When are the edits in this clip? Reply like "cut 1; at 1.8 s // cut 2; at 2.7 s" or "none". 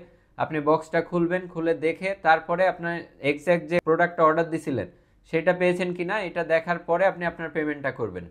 cut 1; at 3.8 s